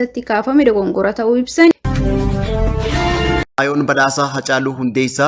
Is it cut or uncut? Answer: cut